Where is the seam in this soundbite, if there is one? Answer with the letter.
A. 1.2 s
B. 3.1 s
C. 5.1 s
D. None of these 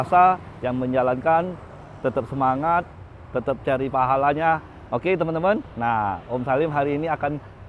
D